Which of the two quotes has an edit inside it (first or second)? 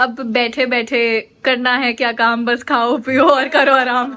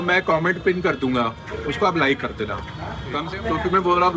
second